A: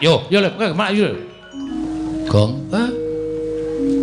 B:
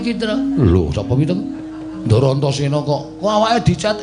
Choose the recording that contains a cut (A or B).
A